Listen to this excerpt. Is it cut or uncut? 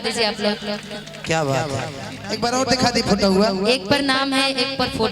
cut